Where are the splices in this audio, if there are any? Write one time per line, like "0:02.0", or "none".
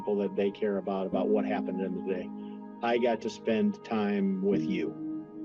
0:04.5